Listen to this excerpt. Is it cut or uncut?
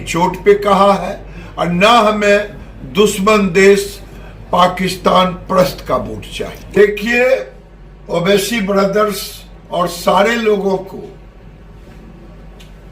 cut